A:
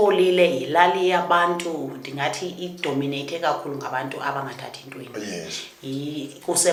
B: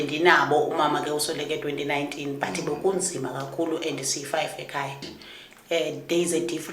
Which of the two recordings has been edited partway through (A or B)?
B